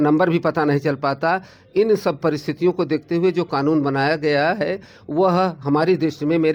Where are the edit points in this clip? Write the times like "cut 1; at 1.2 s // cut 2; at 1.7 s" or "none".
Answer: none